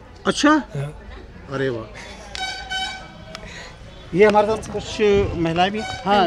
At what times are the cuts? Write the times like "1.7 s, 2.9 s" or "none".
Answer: none